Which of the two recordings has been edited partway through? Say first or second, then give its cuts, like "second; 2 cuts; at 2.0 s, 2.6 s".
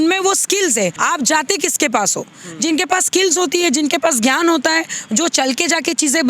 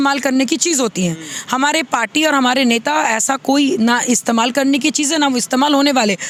first; 1 cut; at 1.0 s